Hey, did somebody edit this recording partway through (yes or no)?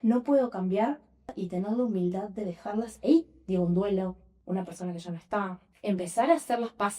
yes